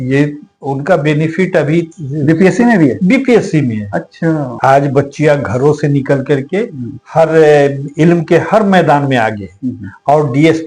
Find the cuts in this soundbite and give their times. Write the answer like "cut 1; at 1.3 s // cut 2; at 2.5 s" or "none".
cut 1; at 4.6 s